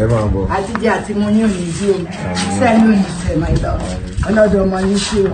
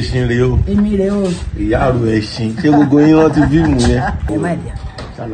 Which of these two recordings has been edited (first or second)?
second